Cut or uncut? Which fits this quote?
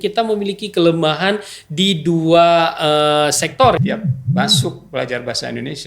cut